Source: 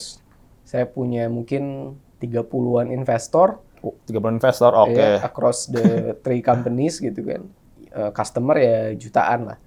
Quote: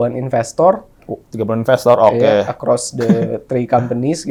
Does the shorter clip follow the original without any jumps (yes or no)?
yes